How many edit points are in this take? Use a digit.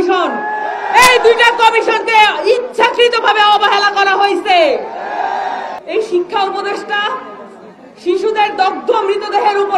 1